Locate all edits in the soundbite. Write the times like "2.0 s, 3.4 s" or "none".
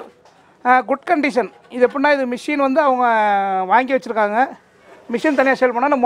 none

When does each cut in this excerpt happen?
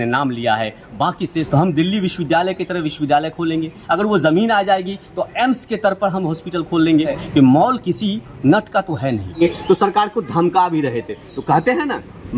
1.5 s, 7.2 s, 9.4 s

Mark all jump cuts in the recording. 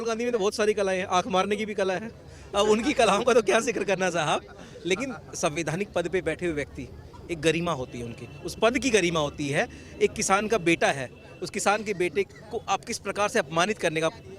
none

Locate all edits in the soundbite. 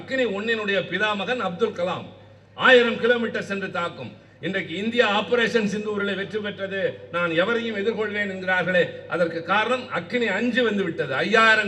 none

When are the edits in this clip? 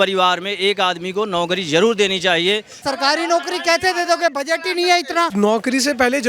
2.8 s, 5.3 s

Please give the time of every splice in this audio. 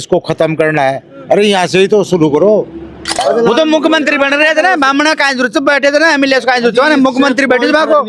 3.2 s

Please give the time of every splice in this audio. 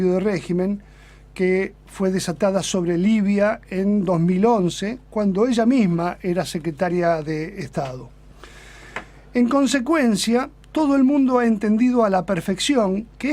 4.3 s

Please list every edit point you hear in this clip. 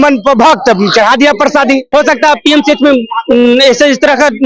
1.8 s

